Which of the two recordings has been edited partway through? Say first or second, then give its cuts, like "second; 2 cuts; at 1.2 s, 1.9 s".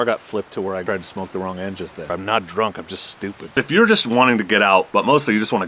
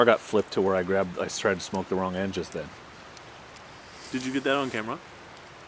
first; 4 cuts; at 0.8 s, 2.1 s, 3.6 s, 4.9 s